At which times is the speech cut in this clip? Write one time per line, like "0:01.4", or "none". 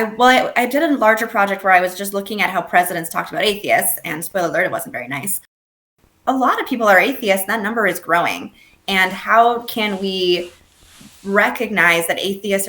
0:05.8